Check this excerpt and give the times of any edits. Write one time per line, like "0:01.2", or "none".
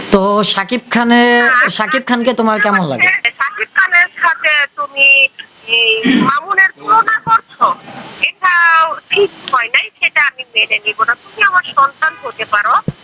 0:03.3